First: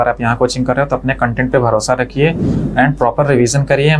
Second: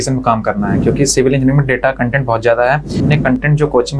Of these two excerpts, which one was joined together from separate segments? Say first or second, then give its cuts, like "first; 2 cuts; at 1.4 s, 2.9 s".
second; 1 cut; at 3.0 s